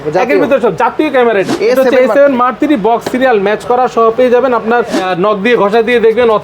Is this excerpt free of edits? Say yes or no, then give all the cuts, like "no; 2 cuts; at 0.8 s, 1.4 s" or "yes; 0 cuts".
no; 2 cuts; at 1.5 s, 5.0 s